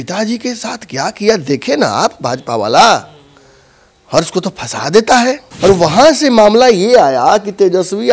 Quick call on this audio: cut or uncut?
cut